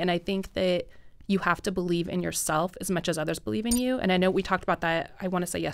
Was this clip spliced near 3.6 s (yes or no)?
no